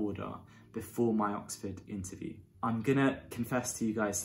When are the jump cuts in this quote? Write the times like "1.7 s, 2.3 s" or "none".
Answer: 2.5 s